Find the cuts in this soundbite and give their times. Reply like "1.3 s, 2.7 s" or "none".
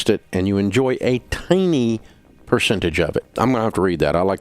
3.3 s